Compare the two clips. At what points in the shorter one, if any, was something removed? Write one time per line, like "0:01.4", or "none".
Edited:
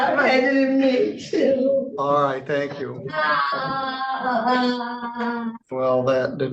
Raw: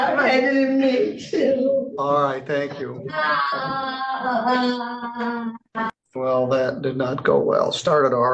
0:05.6